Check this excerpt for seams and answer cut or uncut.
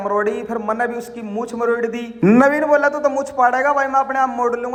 uncut